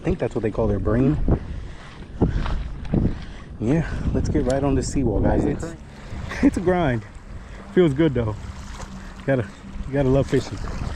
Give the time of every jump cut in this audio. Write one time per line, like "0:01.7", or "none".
0:05.6